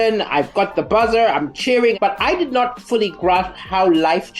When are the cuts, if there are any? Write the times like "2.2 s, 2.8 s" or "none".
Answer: 2.0 s